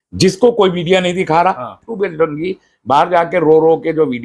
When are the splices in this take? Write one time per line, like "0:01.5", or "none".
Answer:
0:01.8